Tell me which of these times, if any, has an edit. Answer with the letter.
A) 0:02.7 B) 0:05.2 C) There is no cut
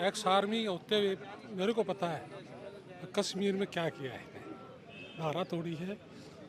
C